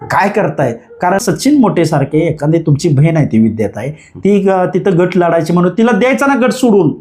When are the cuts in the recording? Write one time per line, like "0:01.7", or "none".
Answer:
0:01.2